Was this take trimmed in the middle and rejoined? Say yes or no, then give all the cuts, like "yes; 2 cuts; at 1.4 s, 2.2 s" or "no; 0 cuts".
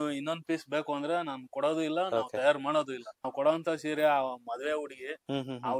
yes; 1 cut; at 3.2 s